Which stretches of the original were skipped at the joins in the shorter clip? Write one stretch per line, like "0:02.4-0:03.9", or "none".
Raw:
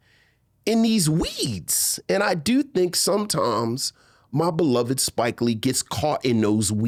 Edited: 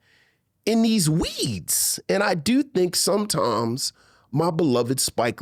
none